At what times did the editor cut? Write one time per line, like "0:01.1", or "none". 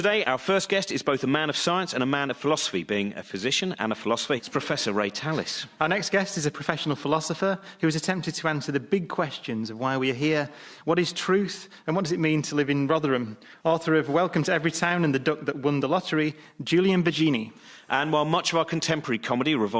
none